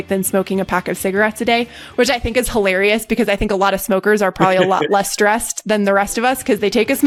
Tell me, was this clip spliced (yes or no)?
no